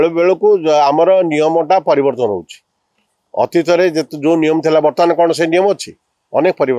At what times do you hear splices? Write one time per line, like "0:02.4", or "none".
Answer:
none

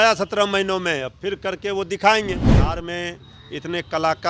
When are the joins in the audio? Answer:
0:02.7

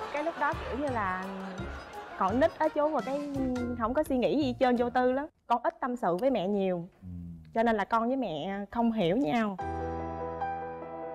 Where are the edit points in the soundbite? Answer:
0:05.3

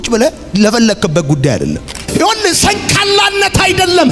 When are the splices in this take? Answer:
0:01.9

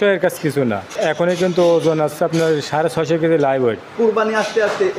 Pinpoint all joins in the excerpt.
0:00.9
0:03.9

